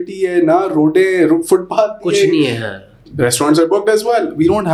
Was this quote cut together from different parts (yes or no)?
no